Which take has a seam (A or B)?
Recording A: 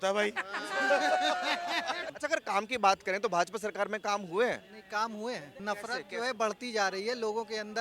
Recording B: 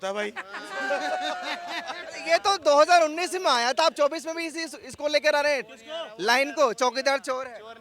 A